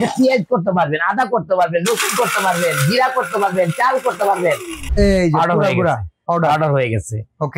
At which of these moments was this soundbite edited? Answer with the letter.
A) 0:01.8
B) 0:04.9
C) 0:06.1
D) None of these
B